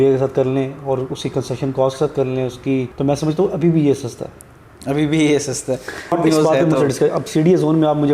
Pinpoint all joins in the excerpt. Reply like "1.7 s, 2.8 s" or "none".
2.9 s, 6.1 s